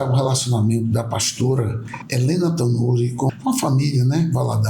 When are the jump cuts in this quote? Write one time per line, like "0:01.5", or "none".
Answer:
0:03.3